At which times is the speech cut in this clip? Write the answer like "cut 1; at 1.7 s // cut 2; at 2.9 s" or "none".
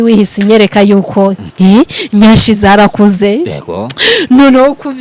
cut 1; at 1.4 s